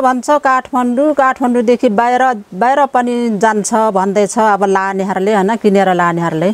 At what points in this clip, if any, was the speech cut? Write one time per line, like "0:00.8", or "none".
none